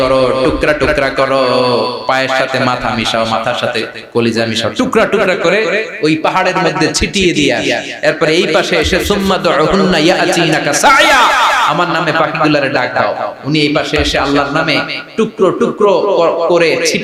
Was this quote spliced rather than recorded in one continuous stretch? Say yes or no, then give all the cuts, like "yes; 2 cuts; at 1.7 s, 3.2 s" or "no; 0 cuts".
no; 0 cuts